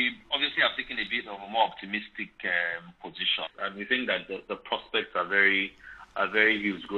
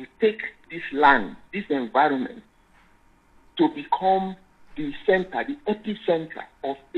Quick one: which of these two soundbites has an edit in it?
first; 1 cut; at 3.5 s

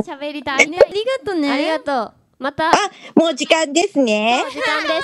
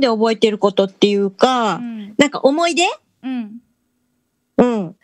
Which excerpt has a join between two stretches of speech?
first; 1 cut; at 0.9 s

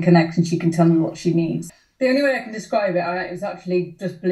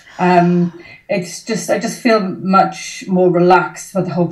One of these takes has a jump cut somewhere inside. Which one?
first; 1 cut; at 1.6 s

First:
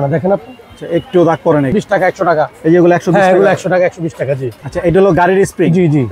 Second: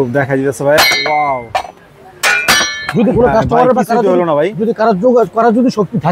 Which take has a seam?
first; 2 cuts; at 1.7 s, 4.5 s

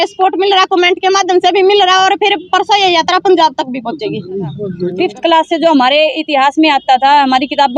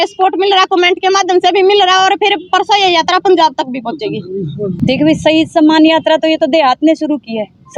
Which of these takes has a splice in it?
first; 1 cut; at 4.7 s

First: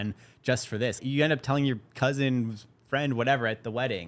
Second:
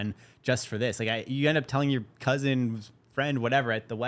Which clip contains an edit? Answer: first; 1 cut; at 1.0 s

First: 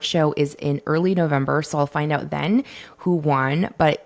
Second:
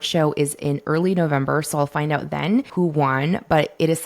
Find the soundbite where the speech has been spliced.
second; 1 cut; at 2.7 s

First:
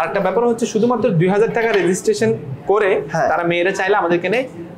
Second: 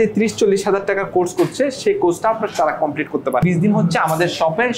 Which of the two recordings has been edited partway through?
second; 1 cut; at 3.4 s

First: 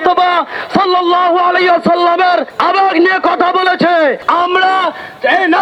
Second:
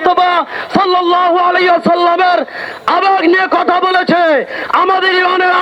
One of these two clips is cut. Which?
first; 2 cuts; at 2.5 s, 4.2 s

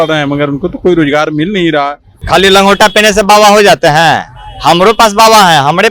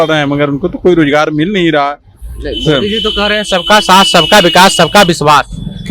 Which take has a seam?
first; 1 cut; at 2.2 s

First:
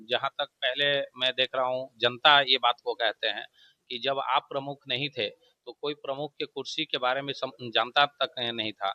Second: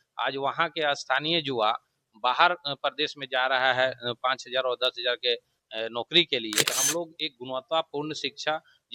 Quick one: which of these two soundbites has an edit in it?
second; 1 cut; at 6.7 s

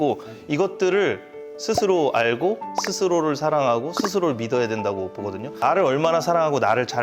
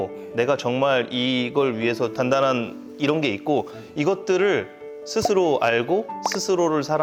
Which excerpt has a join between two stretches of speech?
first; 1 cut; at 5.5 s

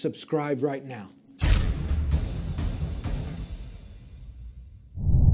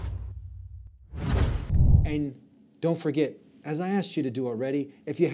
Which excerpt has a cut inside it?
second; 1 cut; at 1.6 s

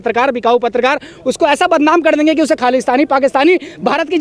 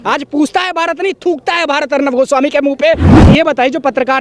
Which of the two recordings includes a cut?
second; 1 cut; at 3.1 s

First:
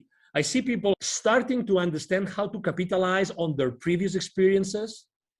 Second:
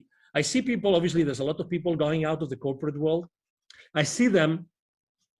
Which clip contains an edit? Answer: first; 1 cut; at 0.9 s

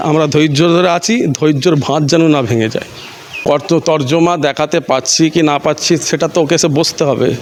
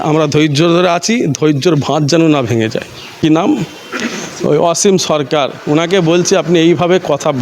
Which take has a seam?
second; 1 cut; at 3.1 s

